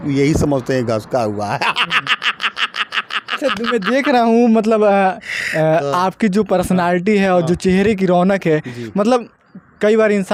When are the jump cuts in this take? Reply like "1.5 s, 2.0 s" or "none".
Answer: none